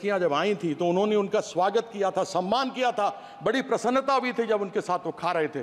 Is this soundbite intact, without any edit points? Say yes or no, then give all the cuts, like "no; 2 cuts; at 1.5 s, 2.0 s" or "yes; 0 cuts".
yes; 0 cuts